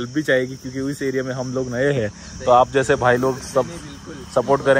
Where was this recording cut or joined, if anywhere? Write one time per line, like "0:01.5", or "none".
none